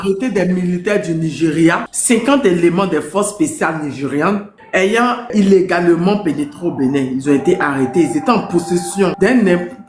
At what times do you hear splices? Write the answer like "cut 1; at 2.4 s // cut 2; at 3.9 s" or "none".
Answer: cut 1; at 1.9 s // cut 2; at 5.3 s // cut 3; at 9.1 s